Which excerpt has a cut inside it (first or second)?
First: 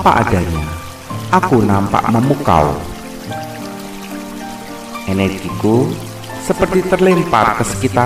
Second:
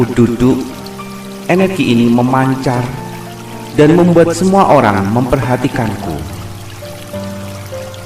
second